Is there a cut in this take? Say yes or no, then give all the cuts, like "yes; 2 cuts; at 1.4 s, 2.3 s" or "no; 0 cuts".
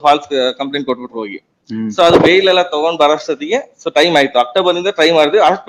no; 0 cuts